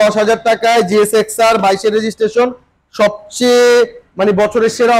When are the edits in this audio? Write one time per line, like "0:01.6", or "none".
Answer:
none

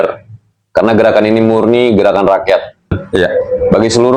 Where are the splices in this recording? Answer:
0:03.0

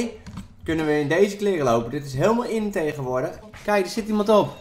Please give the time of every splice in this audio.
0:03.5

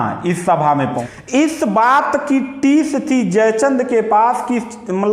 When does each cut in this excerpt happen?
0:01.1

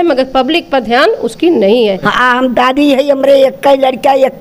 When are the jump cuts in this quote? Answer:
0:02.1

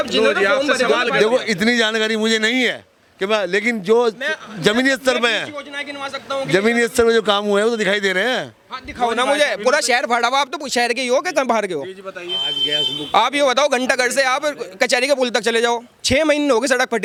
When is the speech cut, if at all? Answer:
none

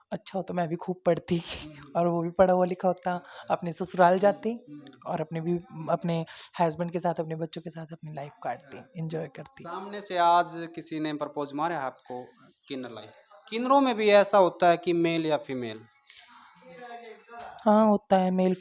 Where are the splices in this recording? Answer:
0:13.2

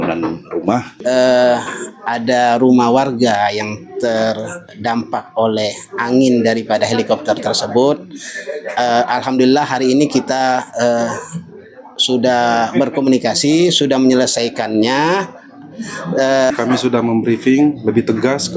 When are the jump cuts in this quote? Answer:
0:01.0
0:16.5

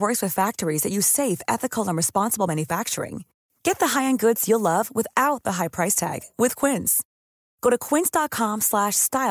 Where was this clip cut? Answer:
none

